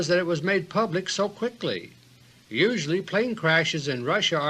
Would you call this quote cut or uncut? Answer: uncut